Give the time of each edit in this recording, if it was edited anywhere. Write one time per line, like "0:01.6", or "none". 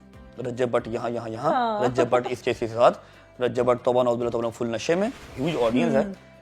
0:05.2